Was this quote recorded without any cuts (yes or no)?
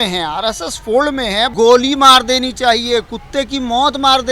no